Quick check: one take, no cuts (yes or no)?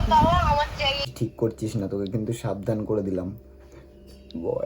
no